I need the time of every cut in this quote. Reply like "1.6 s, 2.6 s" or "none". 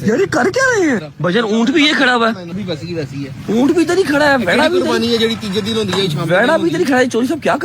1.1 s, 2.6 s